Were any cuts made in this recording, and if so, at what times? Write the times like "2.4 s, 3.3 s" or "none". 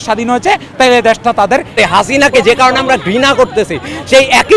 1.8 s